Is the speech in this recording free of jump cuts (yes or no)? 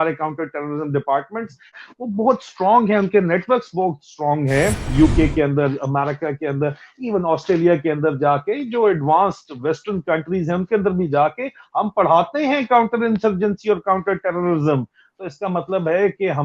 no